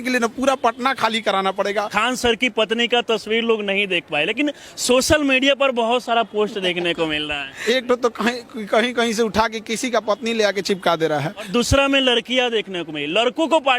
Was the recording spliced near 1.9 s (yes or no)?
yes